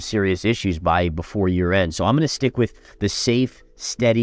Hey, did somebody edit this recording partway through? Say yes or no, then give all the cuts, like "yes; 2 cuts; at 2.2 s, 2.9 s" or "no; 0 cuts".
no; 0 cuts